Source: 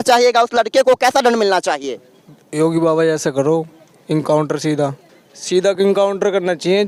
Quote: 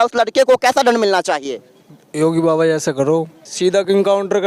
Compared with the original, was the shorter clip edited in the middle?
yes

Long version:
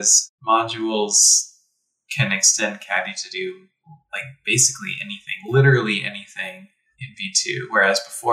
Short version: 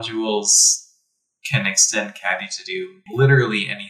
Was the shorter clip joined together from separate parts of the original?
yes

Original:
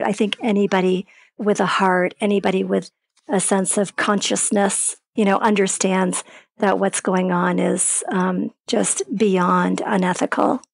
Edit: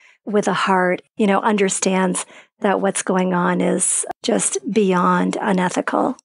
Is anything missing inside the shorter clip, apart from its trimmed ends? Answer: yes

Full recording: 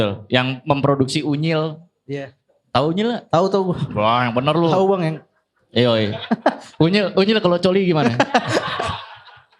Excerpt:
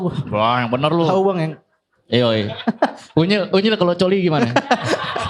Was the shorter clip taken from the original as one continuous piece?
yes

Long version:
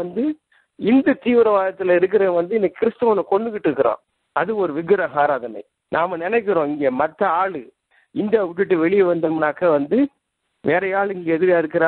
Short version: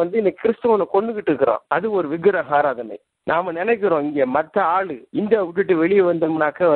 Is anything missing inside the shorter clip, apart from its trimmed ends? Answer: yes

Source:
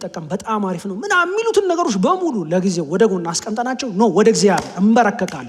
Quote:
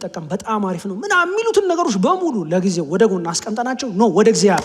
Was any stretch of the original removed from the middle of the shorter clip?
no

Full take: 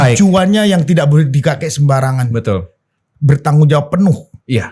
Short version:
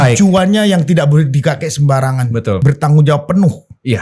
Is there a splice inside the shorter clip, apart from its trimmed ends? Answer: yes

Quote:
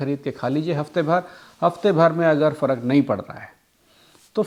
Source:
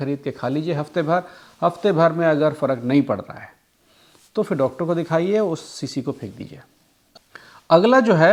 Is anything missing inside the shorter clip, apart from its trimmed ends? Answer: no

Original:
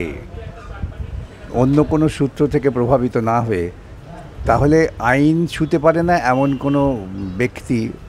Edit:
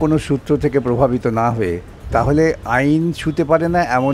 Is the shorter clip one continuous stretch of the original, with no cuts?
no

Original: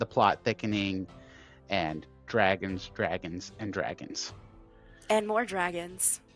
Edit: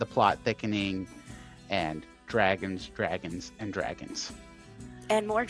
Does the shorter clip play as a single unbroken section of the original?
yes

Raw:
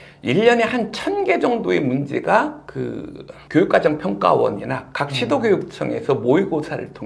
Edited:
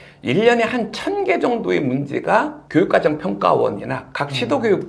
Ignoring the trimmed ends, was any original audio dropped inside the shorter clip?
yes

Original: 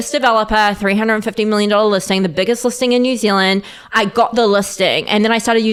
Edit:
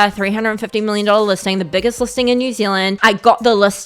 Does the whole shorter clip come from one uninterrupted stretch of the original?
no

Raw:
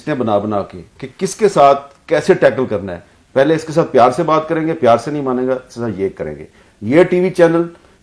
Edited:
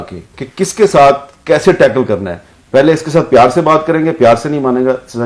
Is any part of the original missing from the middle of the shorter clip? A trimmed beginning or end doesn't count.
no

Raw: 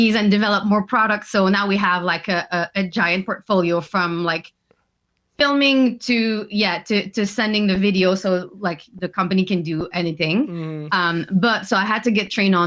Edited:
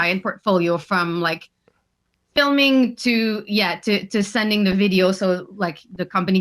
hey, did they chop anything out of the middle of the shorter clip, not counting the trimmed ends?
no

